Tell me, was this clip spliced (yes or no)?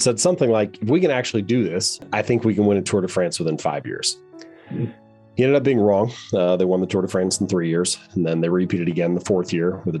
yes